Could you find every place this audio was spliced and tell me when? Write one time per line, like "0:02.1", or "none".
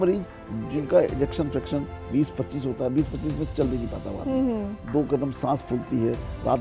none